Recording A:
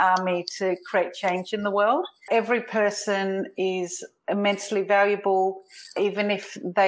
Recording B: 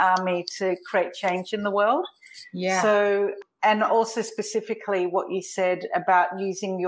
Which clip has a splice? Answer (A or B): A